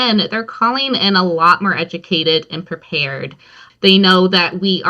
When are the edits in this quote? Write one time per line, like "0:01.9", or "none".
0:03.6

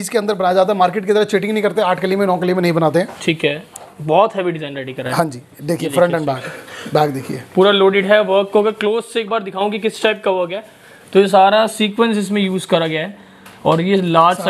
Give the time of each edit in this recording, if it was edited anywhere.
none

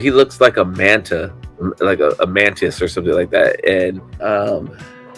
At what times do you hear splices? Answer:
0:04.1

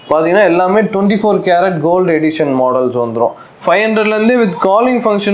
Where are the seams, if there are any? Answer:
0:03.5

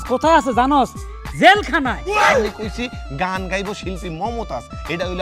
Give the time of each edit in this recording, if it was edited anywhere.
0:02.4

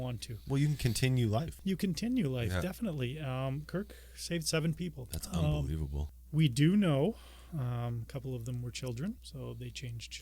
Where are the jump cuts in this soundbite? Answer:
0:01.5
0:05.1
0:06.0
0:09.3

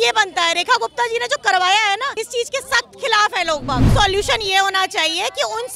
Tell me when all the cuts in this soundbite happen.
0:02.1
0:03.9

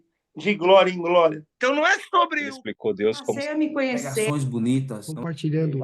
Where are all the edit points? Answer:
0:01.5

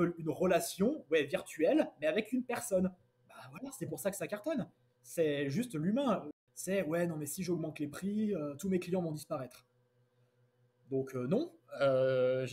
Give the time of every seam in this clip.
0:06.3

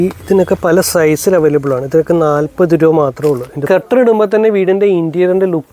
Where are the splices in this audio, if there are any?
0:03.6

